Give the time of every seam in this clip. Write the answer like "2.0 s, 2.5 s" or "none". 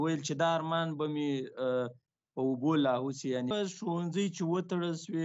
3.5 s